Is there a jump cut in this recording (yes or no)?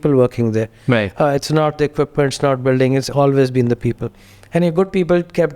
no